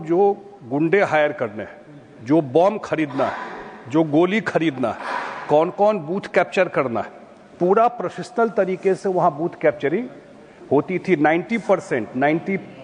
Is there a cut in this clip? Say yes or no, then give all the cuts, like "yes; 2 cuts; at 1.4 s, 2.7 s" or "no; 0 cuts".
no; 0 cuts